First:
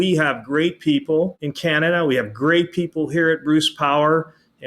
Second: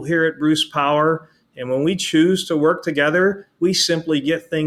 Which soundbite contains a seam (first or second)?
first